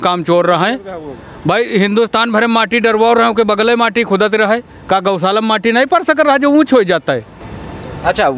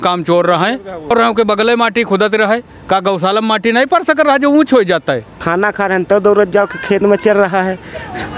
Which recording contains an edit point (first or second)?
second